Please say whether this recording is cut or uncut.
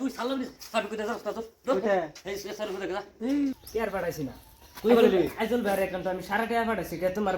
cut